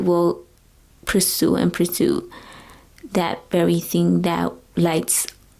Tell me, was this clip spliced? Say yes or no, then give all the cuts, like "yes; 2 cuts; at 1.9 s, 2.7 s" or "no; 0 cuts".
no; 0 cuts